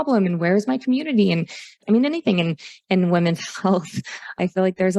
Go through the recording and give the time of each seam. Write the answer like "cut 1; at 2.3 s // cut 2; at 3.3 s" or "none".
cut 1; at 1.7 s

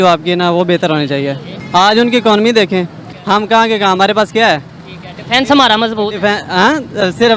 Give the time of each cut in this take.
cut 1; at 1.5 s

